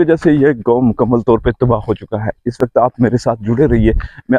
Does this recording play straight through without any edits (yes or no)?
yes